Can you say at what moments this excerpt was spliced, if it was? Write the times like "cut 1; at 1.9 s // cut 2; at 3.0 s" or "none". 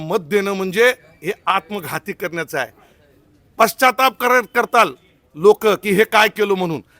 none